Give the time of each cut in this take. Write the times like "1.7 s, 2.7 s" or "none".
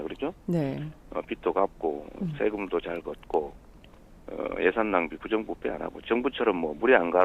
3.1 s